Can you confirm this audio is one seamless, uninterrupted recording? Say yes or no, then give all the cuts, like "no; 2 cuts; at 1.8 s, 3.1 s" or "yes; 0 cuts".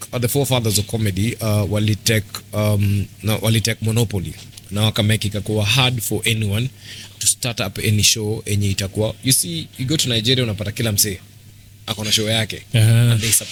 yes; 0 cuts